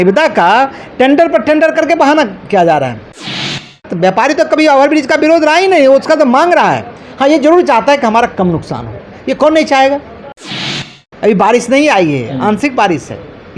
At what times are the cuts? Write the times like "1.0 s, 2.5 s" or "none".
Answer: 3.5 s, 10.6 s